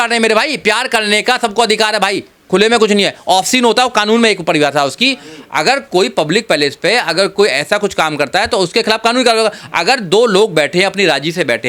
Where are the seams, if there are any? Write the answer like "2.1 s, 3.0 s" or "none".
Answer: none